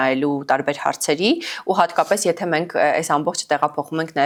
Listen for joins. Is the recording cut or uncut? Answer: uncut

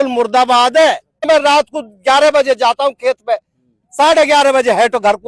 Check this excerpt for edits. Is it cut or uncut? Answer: cut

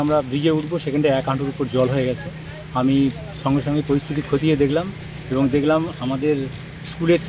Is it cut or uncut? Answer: uncut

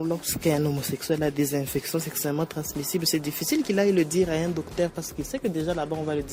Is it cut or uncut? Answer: uncut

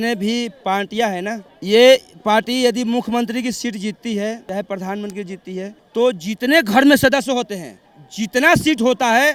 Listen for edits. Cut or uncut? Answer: uncut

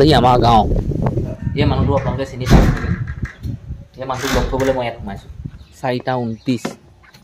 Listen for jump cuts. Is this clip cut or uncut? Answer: cut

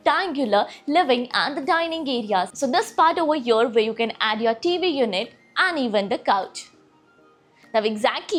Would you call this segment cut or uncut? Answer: uncut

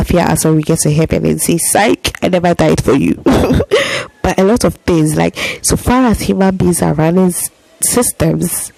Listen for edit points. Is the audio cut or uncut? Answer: uncut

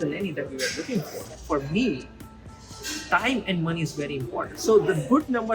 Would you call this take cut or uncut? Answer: cut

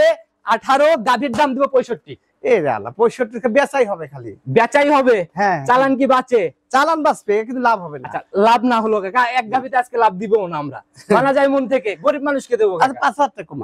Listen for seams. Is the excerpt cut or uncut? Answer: uncut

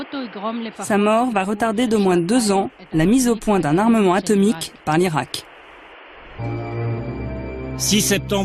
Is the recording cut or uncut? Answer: uncut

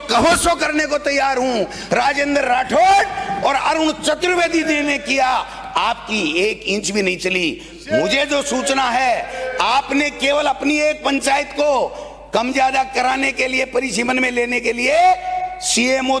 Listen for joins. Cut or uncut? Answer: uncut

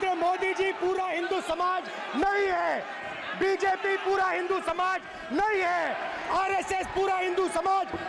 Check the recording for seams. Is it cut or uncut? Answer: uncut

